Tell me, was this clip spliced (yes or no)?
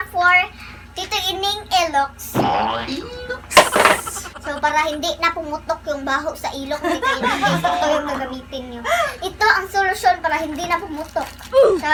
no